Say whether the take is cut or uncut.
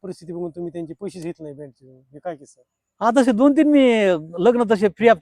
uncut